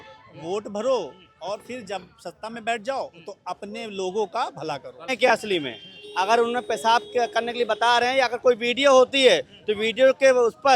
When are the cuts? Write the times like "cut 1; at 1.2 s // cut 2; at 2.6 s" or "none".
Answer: cut 1; at 5.1 s